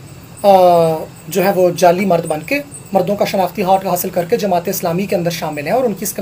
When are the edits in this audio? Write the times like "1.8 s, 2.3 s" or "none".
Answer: none